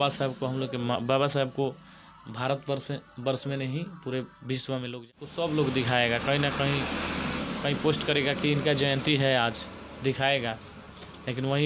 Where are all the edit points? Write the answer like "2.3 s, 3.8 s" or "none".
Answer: 5.1 s